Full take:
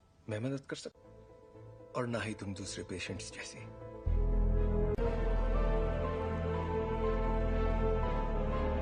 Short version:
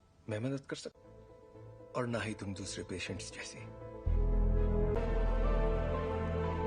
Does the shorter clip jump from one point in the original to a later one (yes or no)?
yes